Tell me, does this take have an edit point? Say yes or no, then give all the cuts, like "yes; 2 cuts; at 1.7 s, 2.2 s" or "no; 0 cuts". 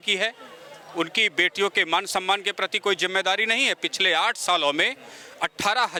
no; 0 cuts